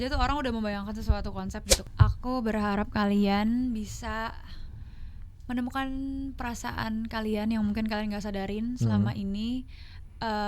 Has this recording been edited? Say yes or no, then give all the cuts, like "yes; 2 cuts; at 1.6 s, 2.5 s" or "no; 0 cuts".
yes; 1 cut; at 1.8 s